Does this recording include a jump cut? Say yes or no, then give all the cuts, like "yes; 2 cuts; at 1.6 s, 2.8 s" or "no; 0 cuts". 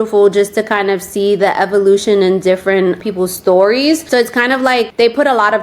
yes; 1 cut; at 4.0 s